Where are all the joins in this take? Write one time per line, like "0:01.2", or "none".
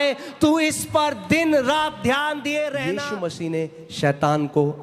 0:03.0